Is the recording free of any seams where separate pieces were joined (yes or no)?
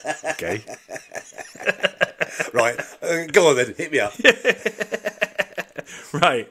yes